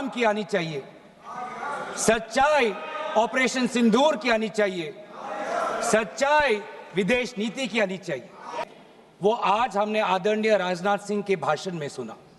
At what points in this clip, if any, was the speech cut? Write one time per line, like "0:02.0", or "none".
0:08.5